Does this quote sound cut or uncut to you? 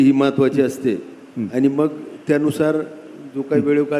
uncut